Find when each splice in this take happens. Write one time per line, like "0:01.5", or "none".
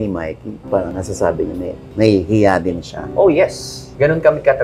0:01.8